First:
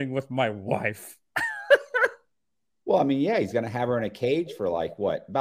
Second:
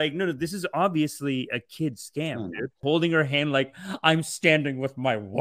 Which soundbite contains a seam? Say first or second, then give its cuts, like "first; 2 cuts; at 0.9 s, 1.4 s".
second; 1 cut; at 2.8 s